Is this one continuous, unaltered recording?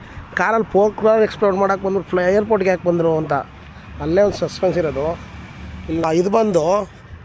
no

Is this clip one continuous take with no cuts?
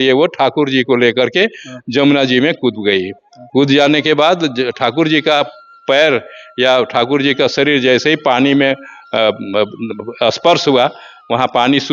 yes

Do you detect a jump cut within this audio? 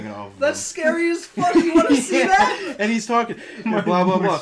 no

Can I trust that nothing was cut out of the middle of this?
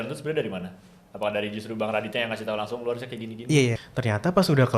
no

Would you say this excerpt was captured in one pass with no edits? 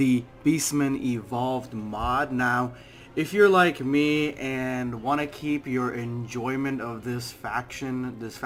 yes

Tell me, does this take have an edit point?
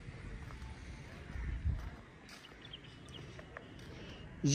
no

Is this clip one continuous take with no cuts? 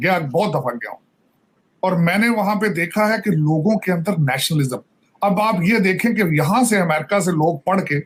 yes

